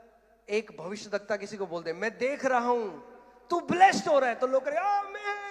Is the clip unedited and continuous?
yes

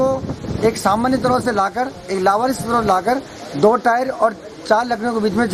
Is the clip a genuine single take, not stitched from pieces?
yes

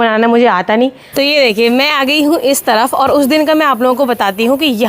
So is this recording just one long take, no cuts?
no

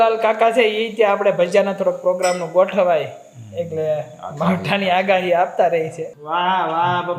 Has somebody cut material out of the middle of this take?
yes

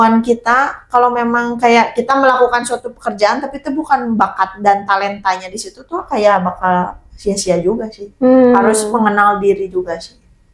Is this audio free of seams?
yes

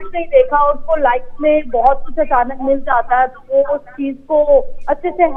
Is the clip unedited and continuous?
yes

